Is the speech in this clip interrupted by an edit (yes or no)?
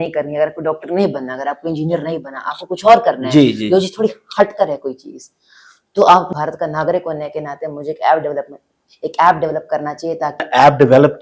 yes